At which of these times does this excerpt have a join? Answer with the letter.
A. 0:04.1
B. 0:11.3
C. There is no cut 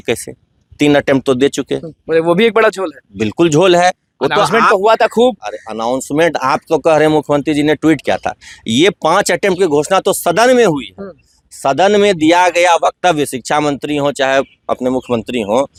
C